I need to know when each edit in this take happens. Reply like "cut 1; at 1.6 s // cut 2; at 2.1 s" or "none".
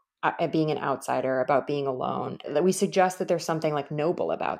cut 1; at 2.5 s